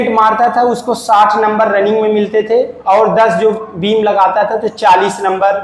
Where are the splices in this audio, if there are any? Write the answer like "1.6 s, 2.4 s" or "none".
none